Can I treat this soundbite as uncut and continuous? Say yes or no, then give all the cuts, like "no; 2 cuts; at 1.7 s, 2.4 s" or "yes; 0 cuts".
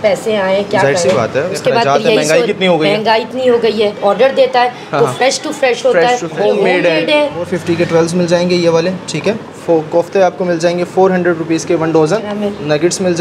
no; 6 cuts; at 1.5 s, 4.0 s, 6.3 s, 7.5 s, 9.5 s, 12.3 s